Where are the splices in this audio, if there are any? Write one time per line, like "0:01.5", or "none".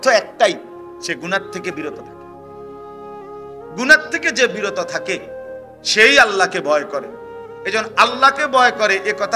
none